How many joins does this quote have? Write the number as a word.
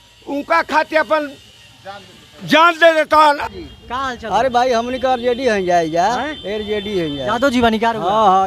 one